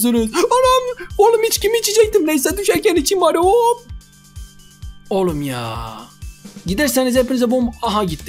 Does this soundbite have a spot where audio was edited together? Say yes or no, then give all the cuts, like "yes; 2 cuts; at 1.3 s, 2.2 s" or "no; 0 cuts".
yes; 1 cut; at 6.5 s